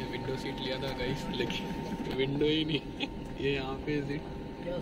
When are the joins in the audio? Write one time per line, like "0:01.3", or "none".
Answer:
none